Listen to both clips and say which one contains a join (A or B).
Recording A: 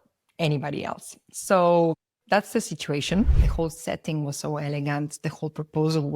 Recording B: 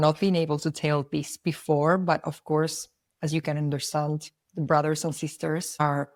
A